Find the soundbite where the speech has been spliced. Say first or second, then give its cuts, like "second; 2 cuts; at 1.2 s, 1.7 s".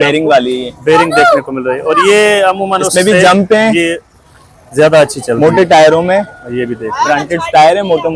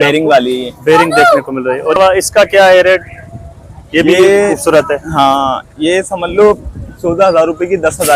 second; 1 cut; at 2.0 s